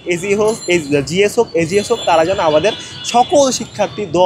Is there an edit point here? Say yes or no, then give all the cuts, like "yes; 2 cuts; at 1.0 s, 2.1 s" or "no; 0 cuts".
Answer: no; 0 cuts